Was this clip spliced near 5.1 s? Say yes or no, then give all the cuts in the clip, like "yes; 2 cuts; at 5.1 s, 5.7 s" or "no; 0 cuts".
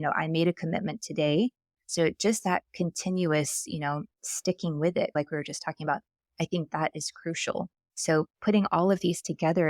yes; 1 cut; at 5.1 s